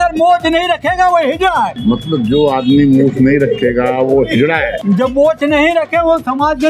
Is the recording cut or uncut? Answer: cut